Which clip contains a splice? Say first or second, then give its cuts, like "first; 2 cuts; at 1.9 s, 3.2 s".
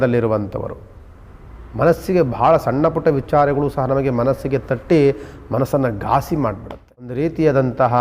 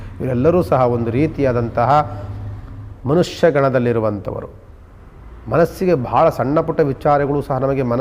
first; 1 cut; at 7.1 s